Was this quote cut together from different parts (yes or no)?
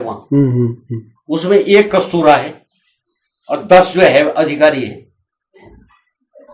no